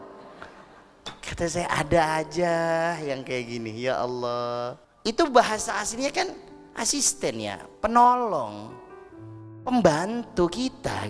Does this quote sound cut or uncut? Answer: cut